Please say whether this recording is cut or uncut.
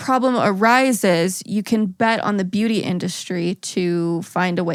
uncut